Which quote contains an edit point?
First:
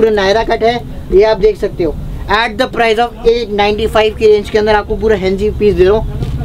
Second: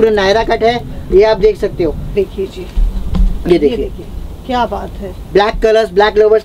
second; 1 cut; at 2.1 s

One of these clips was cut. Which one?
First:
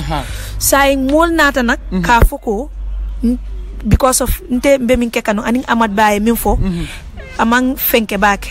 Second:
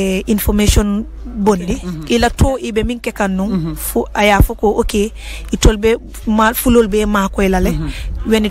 second; 1 cut; at 1.9 s

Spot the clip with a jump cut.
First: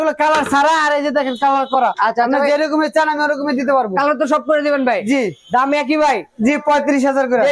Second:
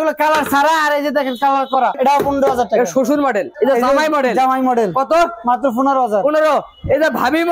second; 2 cuts; at 2.0 s, 3.5 s

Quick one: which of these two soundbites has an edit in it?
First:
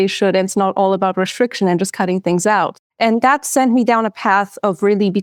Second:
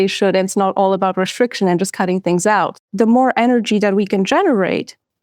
second; 1 cut; at 2.8 s

